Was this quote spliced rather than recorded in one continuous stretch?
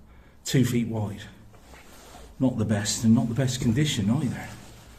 no; 0 cuts

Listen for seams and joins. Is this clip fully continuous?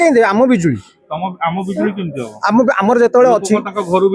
yes; 0 cuts

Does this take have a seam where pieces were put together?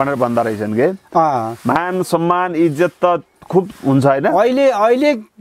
no; 0 cuts

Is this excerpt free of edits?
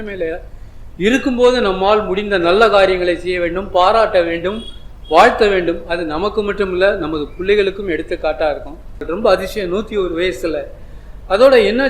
no; 1 cut; at 9.0 s

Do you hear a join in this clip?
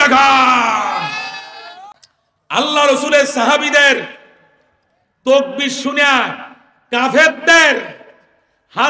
yes; 1 cut; at 1.8 s

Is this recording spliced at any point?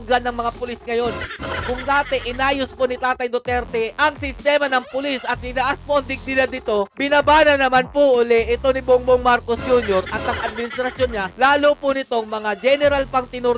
no; 0 cuts

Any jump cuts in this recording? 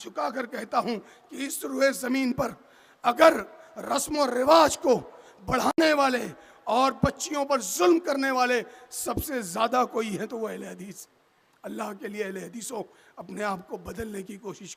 no; 0 cuts

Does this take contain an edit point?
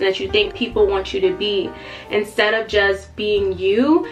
no; 0 cuts

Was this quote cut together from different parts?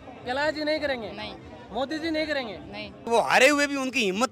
yes; 1 cut; at 3.0 s

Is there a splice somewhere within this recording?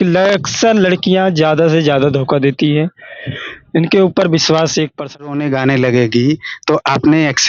yes; 1 cut; at 5.2 s

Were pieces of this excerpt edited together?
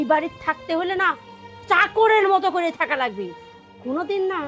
no; 0 cuts

